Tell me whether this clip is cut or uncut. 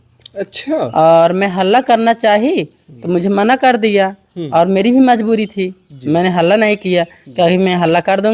uncut